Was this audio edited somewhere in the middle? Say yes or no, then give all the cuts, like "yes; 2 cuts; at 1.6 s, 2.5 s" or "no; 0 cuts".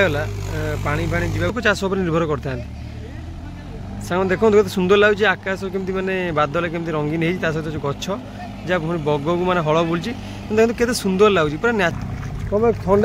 yes; 2 cuts; at 1.5 s, 12.0 s